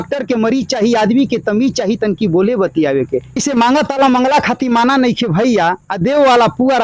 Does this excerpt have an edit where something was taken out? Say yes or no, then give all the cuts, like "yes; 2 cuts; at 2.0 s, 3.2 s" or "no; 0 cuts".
yes; 1 cut; at 3.4 s